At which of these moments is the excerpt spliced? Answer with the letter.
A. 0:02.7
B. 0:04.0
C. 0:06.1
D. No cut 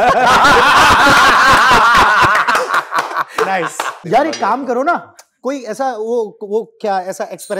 B